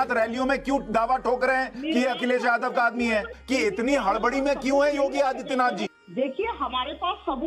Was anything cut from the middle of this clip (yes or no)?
yes